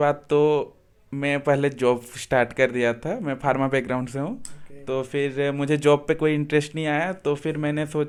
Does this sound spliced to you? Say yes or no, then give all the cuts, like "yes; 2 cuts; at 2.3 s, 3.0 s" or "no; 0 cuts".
no; 0 cuts